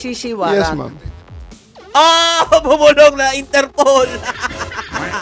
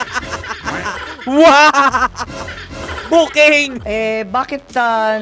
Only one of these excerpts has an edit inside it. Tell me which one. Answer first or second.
second